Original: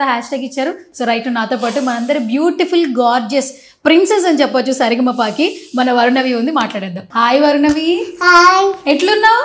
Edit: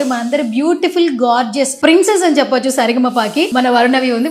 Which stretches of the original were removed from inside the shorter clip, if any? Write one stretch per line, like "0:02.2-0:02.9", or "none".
0:03.5-0:03.7
0:05.5-0:05.7